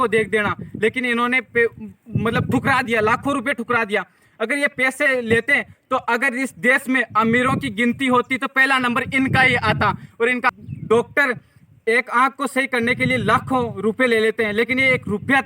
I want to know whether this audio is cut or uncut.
cut